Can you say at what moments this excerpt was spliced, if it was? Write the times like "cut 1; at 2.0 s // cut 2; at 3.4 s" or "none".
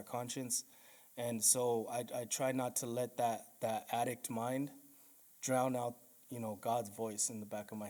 none